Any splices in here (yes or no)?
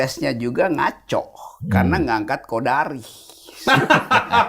no